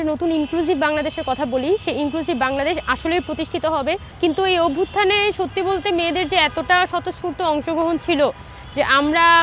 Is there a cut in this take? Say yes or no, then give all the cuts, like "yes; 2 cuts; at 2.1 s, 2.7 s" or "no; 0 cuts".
yes; 1 cut; at 4.1 s